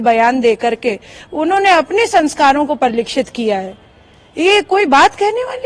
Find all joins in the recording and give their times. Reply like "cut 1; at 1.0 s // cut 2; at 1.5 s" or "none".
none